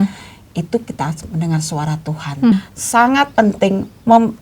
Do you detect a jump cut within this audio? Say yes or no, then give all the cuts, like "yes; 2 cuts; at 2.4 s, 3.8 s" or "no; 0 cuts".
yes; 1 cut; at 2.5 s